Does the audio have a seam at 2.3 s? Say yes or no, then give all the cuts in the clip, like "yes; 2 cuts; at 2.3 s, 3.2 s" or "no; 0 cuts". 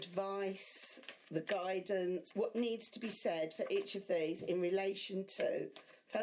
yes; 1 cut; at 2.3 s